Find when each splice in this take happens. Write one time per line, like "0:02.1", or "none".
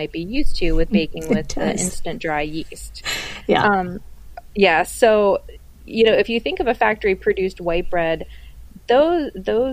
none